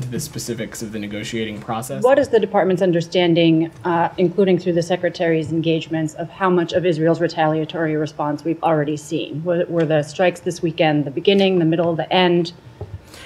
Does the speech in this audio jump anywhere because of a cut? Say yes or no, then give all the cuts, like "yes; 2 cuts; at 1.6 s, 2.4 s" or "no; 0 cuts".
yes; 1 cut; at 1.8 s